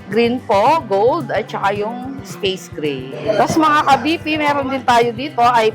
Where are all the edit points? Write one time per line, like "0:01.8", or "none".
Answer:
0:03.2